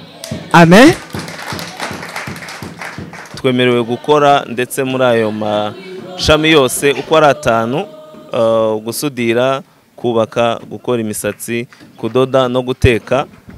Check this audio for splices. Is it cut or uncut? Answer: cut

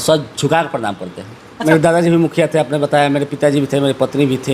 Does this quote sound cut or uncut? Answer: cut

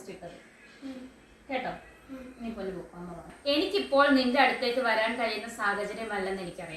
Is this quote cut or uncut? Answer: cut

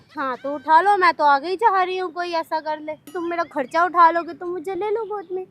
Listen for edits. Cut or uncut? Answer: cut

